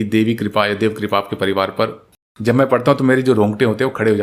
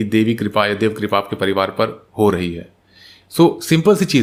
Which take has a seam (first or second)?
first